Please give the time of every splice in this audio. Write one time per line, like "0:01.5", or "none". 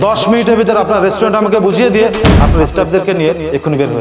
none